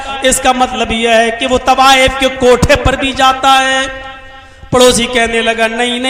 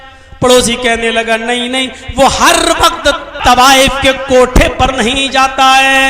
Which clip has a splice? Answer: second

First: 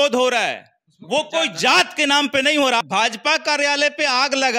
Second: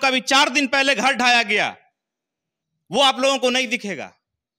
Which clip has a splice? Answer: first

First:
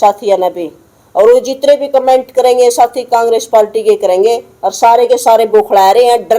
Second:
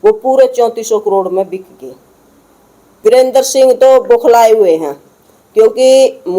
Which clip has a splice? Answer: second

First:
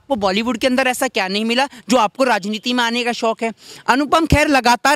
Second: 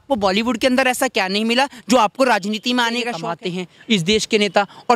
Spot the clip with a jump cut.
second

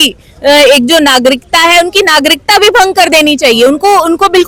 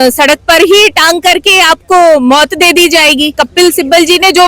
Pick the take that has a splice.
second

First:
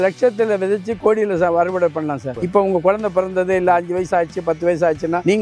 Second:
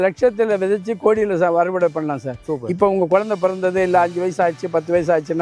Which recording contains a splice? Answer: first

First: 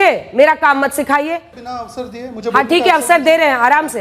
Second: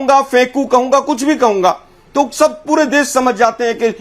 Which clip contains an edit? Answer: first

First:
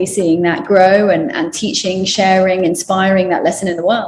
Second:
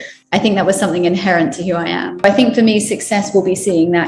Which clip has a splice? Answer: second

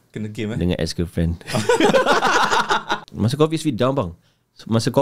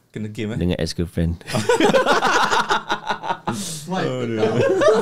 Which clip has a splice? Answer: first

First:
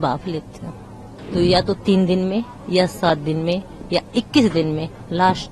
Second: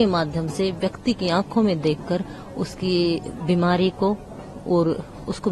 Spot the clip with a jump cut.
first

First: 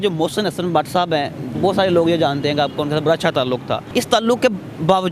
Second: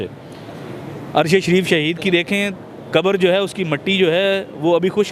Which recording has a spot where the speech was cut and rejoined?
first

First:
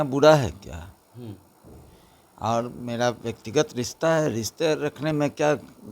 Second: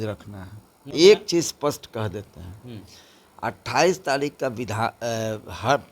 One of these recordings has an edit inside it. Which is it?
second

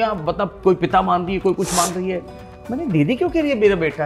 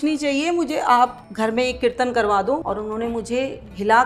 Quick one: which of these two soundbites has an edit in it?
second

